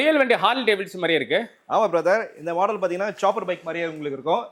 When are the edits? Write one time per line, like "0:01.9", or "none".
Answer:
none